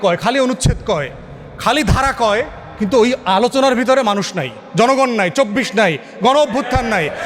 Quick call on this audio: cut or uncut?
uncut